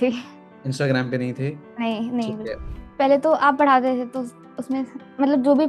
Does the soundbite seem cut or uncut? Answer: cut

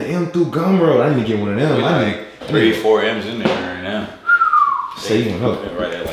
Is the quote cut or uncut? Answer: uncut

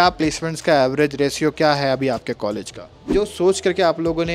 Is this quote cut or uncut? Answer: cut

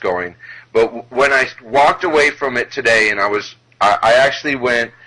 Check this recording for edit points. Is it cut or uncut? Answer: cut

